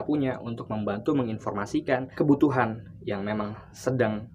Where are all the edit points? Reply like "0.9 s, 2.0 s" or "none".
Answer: 2.0 s